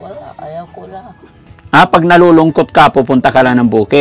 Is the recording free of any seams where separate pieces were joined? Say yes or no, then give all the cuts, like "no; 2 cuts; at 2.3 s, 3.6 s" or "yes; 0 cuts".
no; 1 cut; at 1.4 s